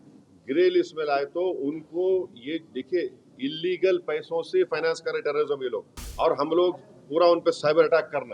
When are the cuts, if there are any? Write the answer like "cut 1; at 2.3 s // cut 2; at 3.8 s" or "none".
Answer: cut 1; at 6.0 s